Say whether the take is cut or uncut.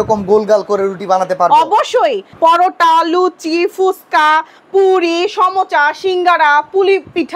cut